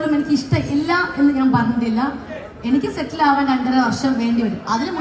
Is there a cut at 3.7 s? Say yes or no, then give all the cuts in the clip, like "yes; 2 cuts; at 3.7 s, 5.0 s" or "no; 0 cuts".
no; 1 cut; at 2.0 s